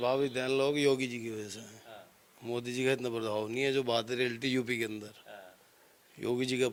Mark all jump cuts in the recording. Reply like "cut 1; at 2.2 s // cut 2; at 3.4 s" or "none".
none